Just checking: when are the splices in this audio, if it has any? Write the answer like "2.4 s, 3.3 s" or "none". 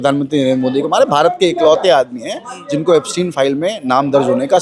none